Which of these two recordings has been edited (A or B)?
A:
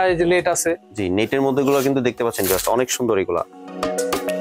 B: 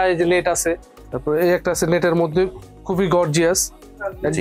B